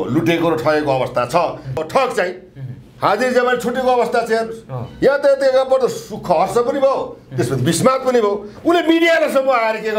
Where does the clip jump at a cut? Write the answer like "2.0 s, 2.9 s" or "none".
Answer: 1.8 s, 8.5 s